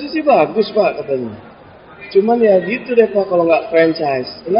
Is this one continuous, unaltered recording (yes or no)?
yes